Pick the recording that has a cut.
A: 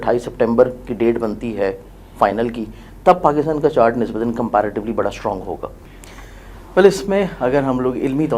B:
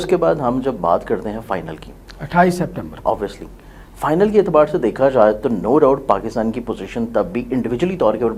A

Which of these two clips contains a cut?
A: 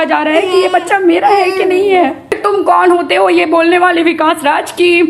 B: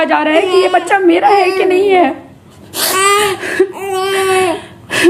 A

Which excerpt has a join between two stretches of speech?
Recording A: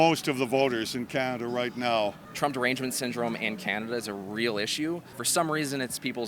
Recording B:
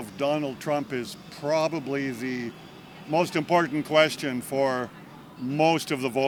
A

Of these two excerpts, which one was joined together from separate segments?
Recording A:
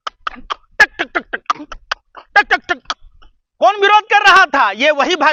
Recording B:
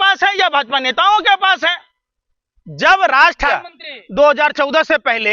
B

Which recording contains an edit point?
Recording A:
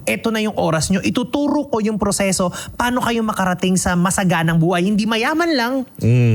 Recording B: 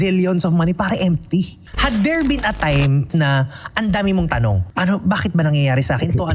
B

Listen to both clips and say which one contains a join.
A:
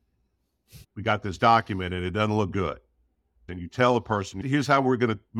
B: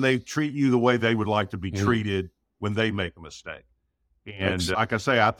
A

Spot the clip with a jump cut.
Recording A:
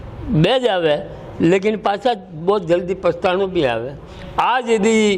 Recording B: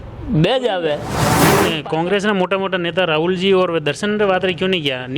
B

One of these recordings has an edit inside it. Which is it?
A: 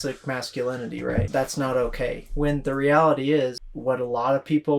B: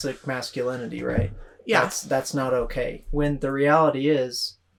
A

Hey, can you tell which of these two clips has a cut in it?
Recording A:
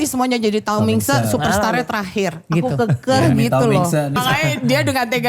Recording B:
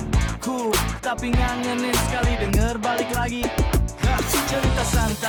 A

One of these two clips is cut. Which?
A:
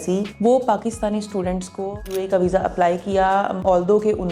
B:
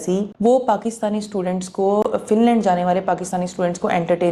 A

